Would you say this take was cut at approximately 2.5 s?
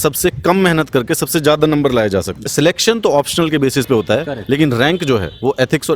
yes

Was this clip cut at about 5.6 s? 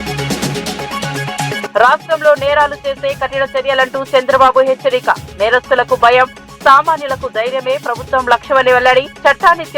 no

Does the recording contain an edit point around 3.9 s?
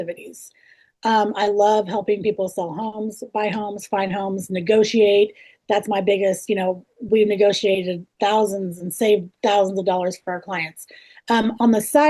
no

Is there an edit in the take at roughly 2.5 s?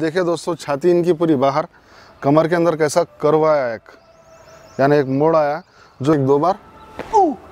no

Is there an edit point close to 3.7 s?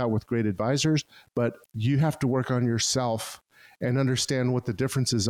no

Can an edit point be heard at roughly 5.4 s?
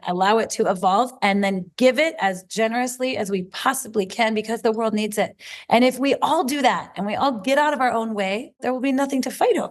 no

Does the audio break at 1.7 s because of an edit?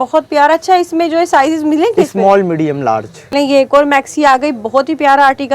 no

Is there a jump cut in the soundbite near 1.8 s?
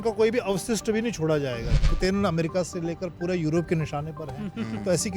yes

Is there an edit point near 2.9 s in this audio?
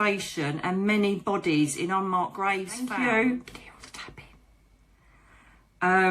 yes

